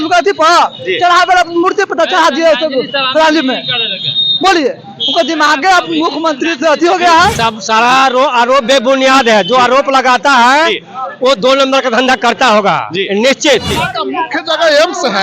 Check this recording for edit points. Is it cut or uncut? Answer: cut